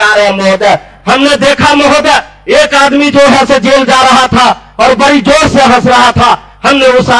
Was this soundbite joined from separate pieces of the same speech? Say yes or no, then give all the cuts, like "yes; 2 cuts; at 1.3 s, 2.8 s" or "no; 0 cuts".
yes; 1 cut; at 1.0 s